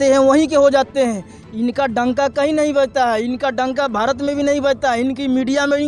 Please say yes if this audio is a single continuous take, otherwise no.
yes